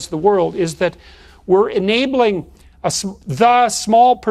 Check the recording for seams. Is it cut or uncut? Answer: uncut